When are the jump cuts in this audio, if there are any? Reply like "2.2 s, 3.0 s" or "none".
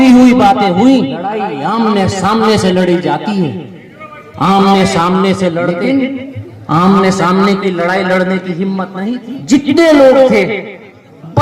1.5 s, 5.7 s, 8.9 s